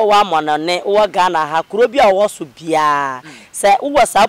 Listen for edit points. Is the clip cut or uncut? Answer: uncut